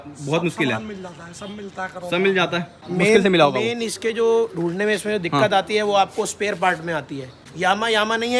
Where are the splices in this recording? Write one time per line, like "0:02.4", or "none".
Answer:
0:02.8
0:07.5